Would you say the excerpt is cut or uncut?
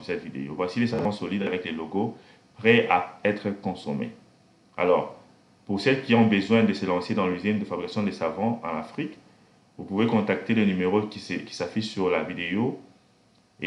uncut